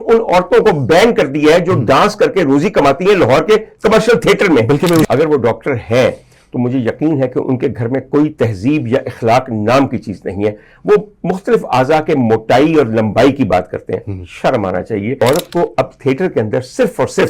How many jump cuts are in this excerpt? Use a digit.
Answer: 2